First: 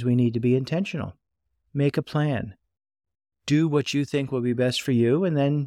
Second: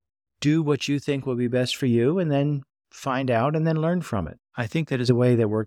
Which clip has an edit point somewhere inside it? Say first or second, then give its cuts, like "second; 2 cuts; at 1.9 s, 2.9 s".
second; 1 cut; at 4.5 s